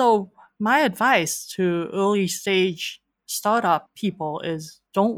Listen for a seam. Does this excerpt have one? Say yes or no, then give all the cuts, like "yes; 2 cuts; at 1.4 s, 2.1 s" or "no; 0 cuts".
yes; 1 cut; at 3.9 s